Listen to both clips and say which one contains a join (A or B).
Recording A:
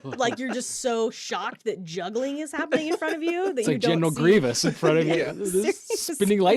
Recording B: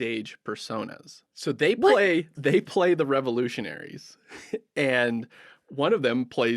B